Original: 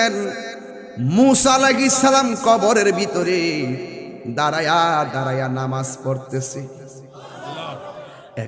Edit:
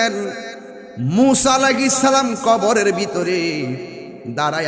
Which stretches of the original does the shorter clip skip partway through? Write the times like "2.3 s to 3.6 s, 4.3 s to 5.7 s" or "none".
none